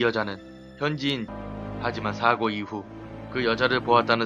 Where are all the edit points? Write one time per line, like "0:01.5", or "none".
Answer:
none